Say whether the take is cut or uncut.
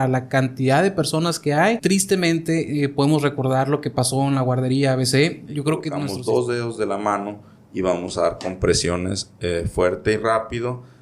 cut